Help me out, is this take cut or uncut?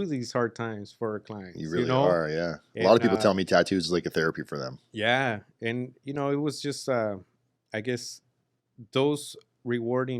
uncut